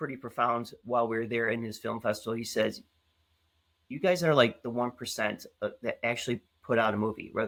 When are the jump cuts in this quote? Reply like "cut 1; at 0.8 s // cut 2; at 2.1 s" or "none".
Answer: none